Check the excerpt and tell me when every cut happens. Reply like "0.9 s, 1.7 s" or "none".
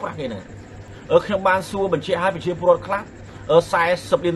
0.9 s